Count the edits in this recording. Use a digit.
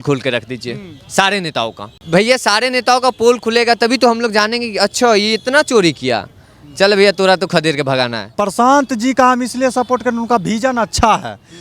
2